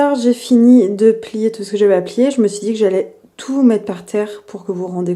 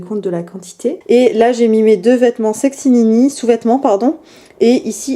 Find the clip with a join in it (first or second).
second